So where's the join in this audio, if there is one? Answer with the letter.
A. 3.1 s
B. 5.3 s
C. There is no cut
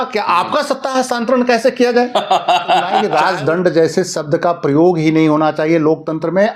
A